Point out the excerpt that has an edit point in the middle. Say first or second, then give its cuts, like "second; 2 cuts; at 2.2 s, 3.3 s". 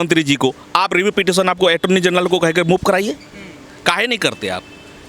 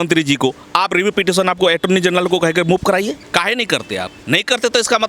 second; 2 cuts; at 3.2 s, 4.2 s